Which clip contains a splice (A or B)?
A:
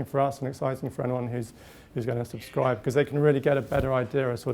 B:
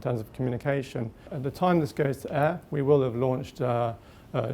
B